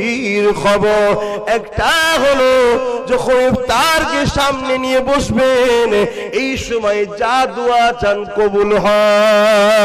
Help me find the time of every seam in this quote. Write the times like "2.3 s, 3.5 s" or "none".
none